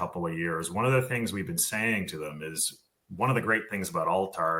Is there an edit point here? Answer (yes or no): no